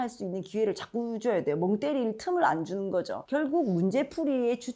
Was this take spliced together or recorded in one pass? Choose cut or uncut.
cut